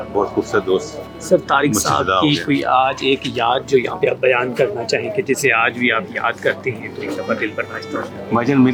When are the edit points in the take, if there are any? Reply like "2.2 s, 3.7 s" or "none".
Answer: none